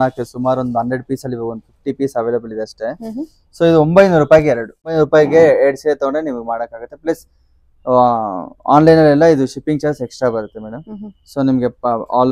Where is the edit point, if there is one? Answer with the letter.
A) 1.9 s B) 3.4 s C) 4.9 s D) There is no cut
C